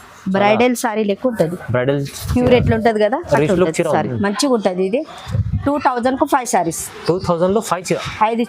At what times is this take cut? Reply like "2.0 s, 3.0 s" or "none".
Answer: 4.1 s